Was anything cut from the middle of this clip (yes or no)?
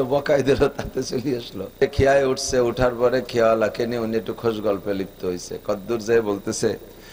yes